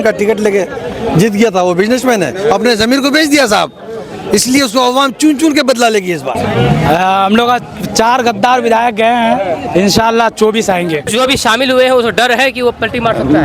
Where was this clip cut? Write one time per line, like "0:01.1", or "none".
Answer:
0:06.3
0:11.1